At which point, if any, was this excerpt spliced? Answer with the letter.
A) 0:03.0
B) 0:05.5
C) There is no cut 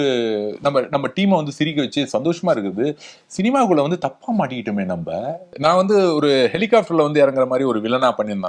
B